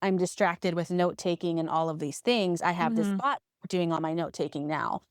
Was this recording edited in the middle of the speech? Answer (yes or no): no